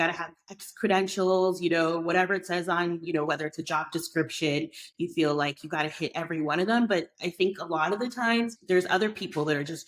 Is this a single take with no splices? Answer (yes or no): no